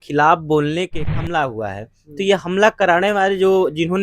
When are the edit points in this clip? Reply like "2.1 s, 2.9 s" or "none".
1.1 s